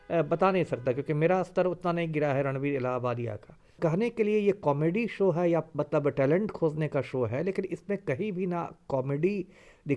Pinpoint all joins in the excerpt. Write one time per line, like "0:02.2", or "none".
0:03.8